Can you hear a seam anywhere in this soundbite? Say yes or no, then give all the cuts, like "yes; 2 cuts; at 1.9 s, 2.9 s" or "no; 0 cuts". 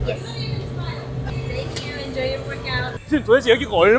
yes; 1 cut; at 3.0 s